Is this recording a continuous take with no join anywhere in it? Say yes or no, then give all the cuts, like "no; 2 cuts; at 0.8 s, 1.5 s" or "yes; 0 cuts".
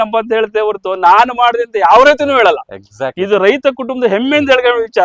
yes; 0 cuts